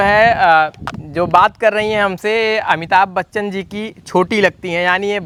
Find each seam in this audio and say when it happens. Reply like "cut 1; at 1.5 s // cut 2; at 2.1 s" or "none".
none